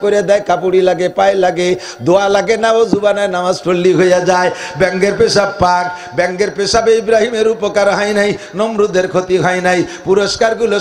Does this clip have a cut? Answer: no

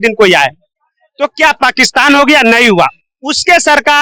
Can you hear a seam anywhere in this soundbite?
no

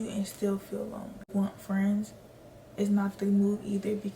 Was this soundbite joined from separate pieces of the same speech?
yes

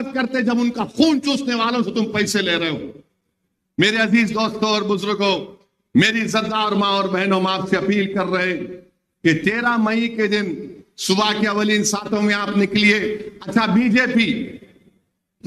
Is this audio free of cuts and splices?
yes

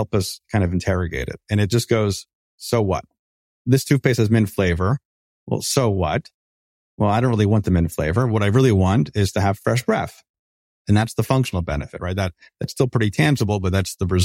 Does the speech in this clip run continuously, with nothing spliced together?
no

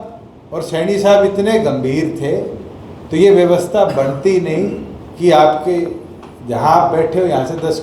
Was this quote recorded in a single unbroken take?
yes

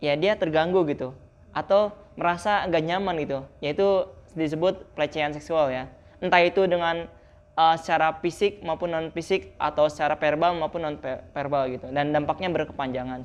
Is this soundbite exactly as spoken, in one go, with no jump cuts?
yes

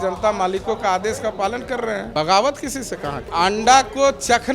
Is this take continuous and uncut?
no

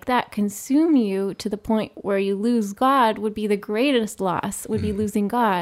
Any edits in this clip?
no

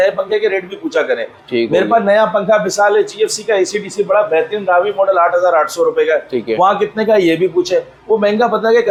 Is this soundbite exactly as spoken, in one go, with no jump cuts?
yes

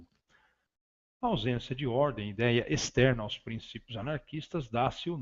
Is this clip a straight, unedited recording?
yes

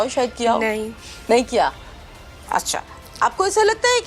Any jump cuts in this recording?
no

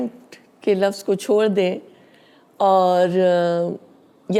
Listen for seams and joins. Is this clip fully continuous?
yes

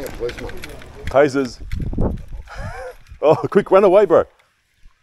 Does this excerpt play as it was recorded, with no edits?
yes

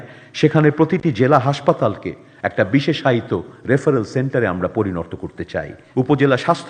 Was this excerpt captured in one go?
no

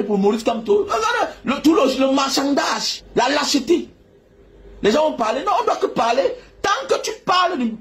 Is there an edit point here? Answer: yes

